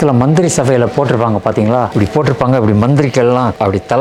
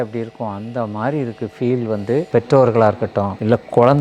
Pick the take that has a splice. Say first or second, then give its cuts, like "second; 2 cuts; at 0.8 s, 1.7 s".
second; 1 cut; at 2.3 s